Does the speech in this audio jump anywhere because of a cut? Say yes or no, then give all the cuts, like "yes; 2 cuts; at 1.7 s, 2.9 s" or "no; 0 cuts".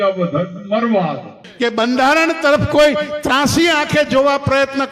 yes; 1 cut; at 1.4 s